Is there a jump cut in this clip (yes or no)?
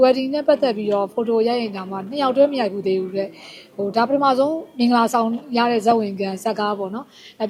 no